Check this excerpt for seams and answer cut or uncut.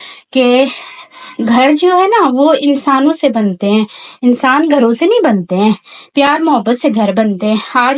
uncut